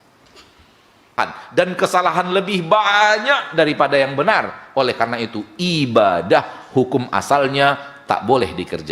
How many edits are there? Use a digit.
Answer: 1